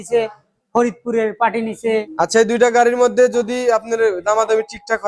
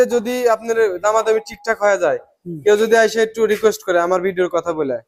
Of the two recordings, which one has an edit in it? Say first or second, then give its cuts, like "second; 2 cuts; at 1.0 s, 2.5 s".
first; 1 cut; at 2.1 s